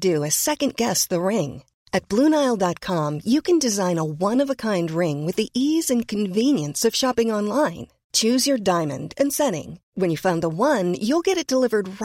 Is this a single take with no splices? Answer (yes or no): yes